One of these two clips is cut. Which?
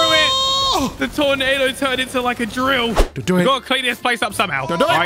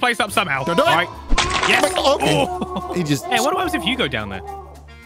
first; 2 cuts; at 1.1 s, 3.1 s

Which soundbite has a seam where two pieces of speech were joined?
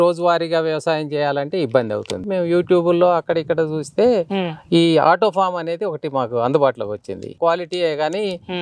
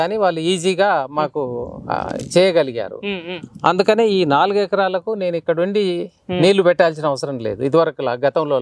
first; 2 cuts; at 2.3 s, 7.3 s

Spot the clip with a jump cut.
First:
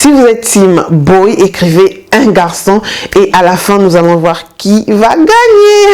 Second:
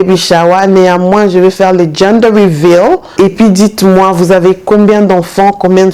second; 1 cut; at 3.1 s

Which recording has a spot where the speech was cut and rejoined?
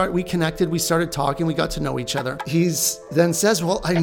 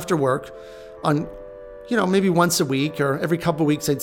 first; 1 cut; at 2.4 s

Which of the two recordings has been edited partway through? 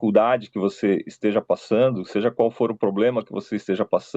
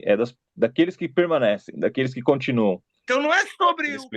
second; 1 cut; at 2.9 s

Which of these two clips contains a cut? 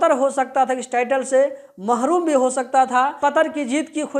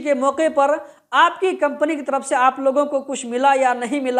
first; 1 cut; at 3.2 s

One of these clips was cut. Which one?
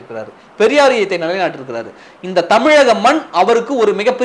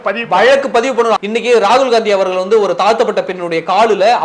second; 1 cut; at 1.2 s

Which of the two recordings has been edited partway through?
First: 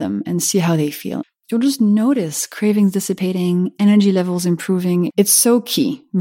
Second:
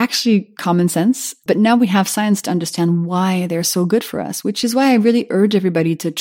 first; 2 cuts; at 1.1 s, 5.1 s

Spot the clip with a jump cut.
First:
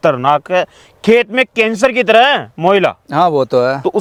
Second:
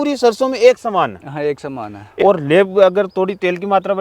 second; 1 cut; at 2.0 s

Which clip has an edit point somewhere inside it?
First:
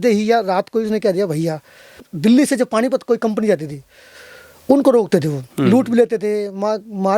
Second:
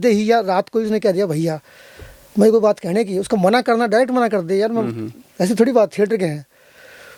first; 1 cut; at 2.1 s

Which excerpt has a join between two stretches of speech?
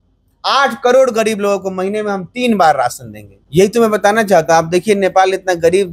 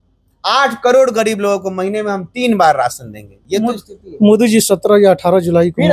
first; 1 cut; at 3.3 s

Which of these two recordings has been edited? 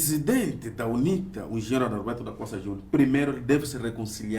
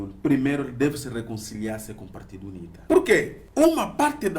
second; 2 cuts; at 2.7 s, 3.4 s

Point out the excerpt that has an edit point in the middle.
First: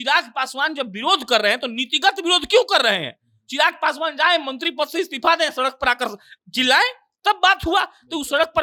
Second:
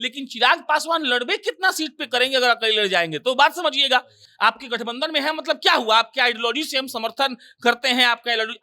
second; 1 cut; at 4.2 s

